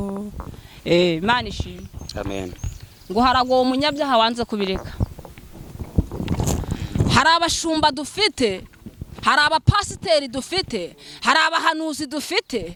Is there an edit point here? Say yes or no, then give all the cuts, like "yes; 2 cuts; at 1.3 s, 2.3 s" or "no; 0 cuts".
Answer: no; 0 cuts